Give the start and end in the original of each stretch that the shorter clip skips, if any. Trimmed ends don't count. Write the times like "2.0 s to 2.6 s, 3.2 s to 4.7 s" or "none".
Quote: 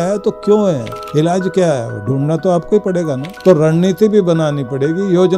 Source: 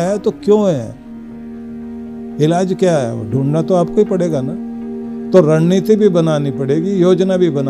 1.0 s to 2.2 s, 4.5 s to 5.1 s